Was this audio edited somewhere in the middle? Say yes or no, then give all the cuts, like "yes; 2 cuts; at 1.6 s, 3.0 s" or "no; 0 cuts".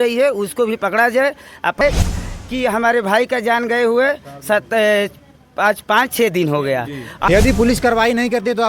yes; 2 cuts; at 1.8 s, 7.3 s